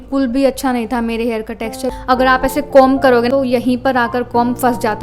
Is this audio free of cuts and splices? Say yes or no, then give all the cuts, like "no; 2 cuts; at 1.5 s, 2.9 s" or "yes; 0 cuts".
no; 2 cuts; at 1.9 s, 3.3 s